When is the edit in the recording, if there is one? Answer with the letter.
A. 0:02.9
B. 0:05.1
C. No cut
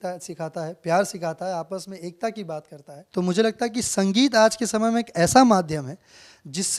A